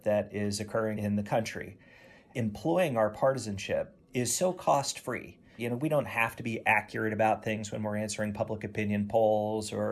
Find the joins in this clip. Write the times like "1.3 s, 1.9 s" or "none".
1.0 s, 2.3 s, 5.6 s